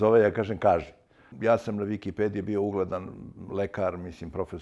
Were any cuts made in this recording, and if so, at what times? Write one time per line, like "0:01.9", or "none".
0:01.3